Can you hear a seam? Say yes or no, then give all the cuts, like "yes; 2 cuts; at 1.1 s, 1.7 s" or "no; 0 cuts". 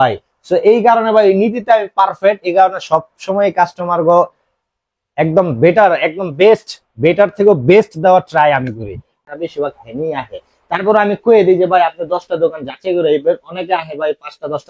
yes; 1 cut; at 9.1 s